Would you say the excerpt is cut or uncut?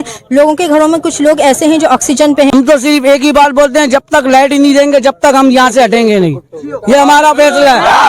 cut